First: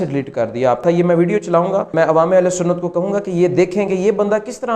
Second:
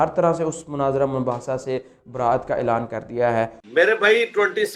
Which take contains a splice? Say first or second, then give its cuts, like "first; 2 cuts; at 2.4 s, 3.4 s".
first; 2 cuts; at 0.8 s, 1.9 s